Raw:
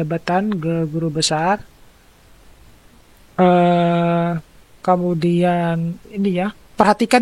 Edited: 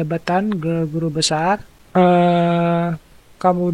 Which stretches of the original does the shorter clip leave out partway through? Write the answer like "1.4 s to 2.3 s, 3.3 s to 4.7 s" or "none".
1.8 s to 3.2 s